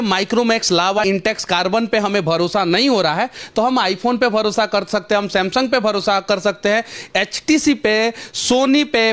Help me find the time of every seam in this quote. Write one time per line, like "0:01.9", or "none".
0:01.0